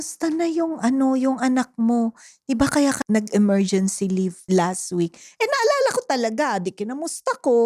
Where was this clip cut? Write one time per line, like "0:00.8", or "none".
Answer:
0:03.0
0:04.4